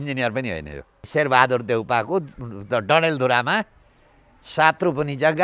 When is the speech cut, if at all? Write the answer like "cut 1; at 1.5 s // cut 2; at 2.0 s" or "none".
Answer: cut 1; at 1.1 s

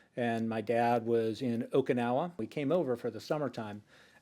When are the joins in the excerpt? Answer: cut 1; at 2.4 s

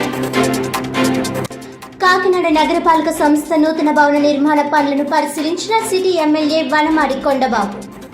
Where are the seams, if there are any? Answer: cut 1; at 1.5 s

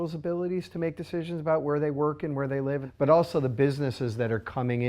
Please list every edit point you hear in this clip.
cut 1; at 2.9 s

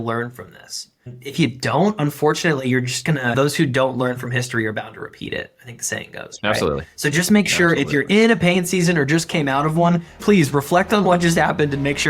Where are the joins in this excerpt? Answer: cut 1; at 10.2 s

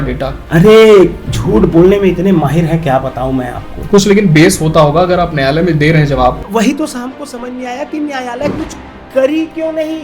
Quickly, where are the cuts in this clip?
cut 1; at 6.4 s

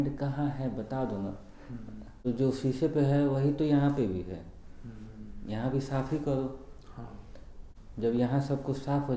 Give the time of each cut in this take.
cut 1; at 2.3 s // cut 2; at 7.6 s

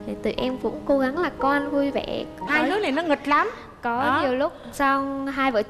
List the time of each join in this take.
cut 1; at 2.4 s

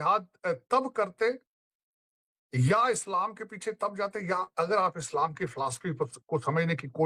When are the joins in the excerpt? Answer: none

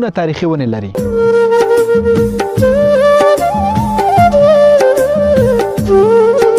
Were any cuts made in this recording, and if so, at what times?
cut 1; at 0.9 s

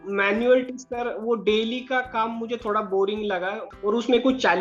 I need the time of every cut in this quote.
cut 1; at 3.6 s

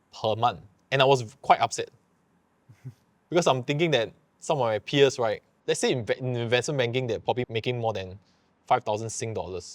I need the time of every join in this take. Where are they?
none

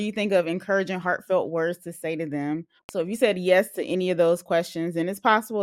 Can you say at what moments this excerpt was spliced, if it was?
cut 1; at 2.8 s

